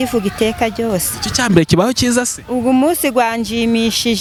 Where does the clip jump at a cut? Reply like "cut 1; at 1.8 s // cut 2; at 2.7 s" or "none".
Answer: none